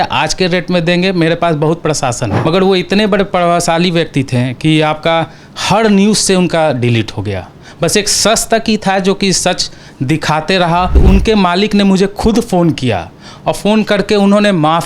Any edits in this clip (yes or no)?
yes